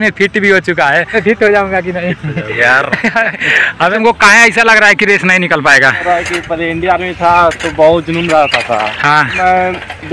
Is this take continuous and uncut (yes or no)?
no